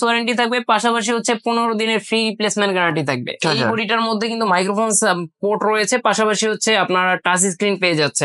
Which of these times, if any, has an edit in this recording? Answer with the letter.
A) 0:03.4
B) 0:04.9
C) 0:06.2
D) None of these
A